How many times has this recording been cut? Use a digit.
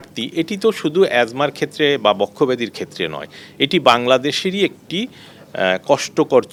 0